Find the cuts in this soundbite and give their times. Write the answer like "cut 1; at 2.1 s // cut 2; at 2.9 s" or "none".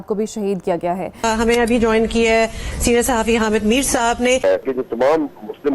cut 1; at 1.2 s // cut 2; at 4.4 s